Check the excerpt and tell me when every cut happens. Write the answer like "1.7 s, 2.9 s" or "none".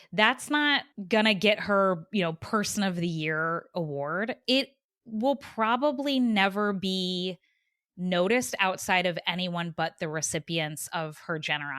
none